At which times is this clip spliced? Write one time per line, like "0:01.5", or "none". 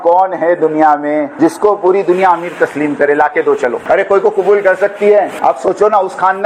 0:01.3
0:03.8
0:05.3